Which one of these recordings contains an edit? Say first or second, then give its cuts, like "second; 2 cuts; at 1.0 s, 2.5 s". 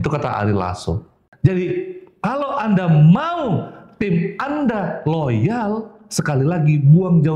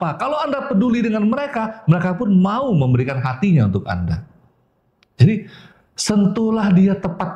first; 1 cut; at 1.2 s